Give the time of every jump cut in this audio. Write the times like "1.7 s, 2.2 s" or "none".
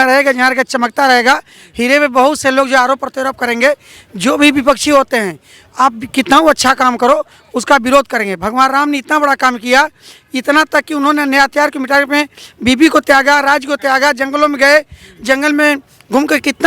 none